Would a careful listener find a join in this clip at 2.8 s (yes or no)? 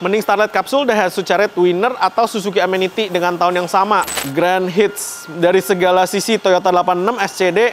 no